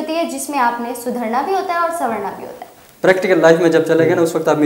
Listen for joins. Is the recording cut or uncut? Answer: cut